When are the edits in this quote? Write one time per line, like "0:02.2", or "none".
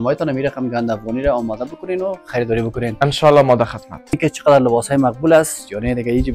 0:04.2

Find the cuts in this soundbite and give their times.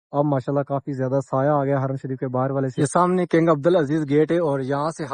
0:02.7

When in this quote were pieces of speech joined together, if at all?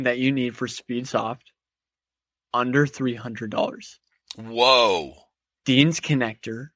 none

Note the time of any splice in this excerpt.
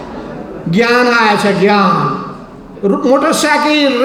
0:02.7

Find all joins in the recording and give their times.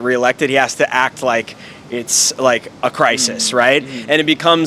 none

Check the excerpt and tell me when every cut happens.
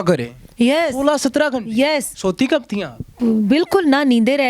none

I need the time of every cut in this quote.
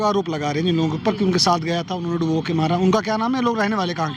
none

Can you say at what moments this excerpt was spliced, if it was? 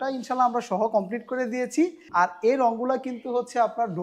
0:02.0

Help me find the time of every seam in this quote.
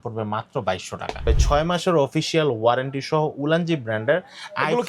0:01.2

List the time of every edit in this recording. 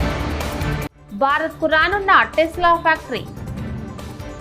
0:00.9

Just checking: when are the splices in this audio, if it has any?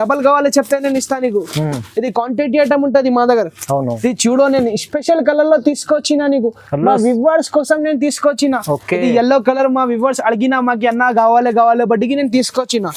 0:03.9

